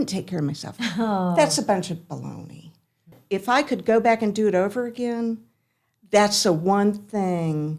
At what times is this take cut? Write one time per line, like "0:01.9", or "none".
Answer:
0:03.1